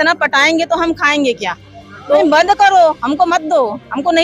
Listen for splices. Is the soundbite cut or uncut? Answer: cut